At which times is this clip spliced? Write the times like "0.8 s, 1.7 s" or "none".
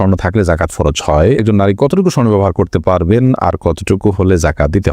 1.4 s